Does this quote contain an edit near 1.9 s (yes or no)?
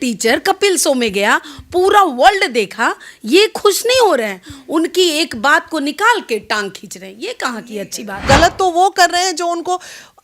no